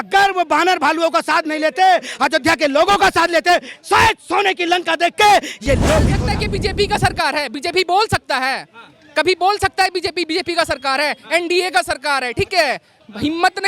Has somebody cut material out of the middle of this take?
yes; 1 cut; at 6.2 s

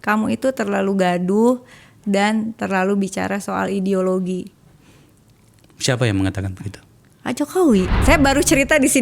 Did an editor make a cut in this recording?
yes; 1 cut; at 8.0 s

